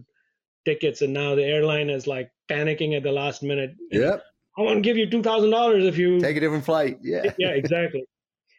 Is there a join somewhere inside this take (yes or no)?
no